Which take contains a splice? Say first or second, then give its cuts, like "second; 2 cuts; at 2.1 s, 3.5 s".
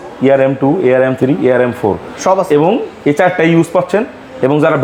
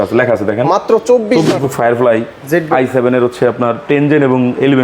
second; 1 cut; at 1.5 s